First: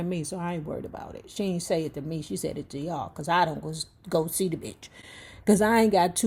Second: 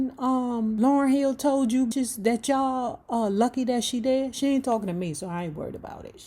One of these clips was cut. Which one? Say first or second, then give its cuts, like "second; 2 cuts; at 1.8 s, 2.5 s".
second; 2 cuts; at 0.8 s, 1.9 s